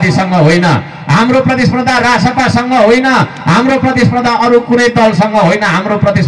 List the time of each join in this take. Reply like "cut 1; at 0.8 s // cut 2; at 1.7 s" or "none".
none